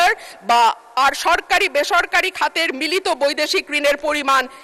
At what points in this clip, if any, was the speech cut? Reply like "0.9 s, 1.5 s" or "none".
none